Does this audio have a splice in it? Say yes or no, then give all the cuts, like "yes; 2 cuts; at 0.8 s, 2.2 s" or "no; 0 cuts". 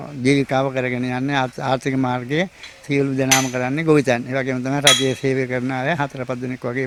no; 0 cuts